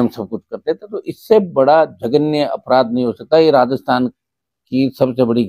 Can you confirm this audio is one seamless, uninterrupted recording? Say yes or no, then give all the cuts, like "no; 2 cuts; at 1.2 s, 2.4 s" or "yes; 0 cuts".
yes; 0 cuts